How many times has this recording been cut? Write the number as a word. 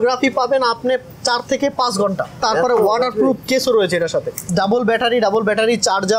two